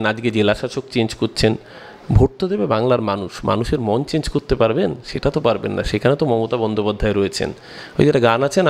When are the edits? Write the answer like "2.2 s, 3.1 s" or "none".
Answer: none